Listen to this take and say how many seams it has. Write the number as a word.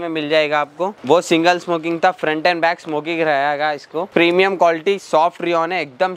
two